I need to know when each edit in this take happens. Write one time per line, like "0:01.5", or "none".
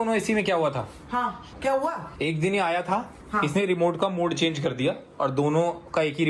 0:01.5